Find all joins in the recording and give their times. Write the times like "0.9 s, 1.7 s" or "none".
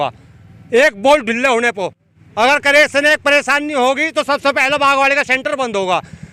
none